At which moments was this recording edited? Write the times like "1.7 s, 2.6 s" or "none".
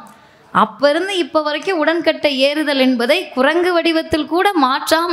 none